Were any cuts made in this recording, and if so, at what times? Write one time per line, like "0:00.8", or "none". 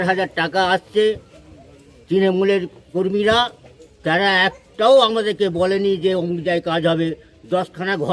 none